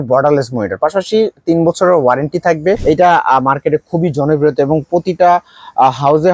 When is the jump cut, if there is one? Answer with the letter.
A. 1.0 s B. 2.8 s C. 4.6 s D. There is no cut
B